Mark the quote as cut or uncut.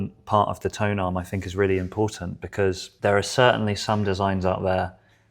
cut